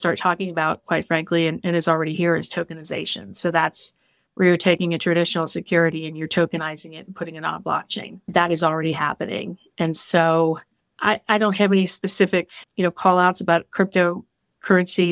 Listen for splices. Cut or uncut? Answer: uncut